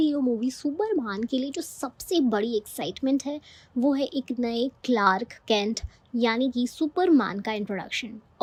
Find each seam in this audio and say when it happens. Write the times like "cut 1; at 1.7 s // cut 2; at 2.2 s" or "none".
none